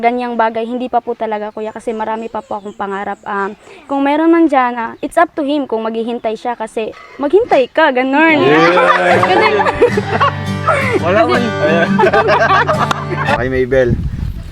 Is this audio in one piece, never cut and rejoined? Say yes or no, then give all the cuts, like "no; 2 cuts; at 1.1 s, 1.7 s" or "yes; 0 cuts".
no; 1 cut; at 13.4 s